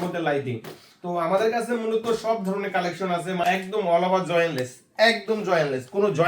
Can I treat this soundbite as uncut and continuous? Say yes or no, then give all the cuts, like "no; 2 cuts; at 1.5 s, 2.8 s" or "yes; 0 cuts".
no; 1 cut; at 3.4 s